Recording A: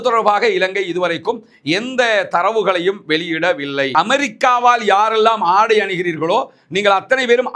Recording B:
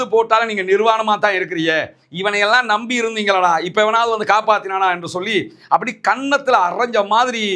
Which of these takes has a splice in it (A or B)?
A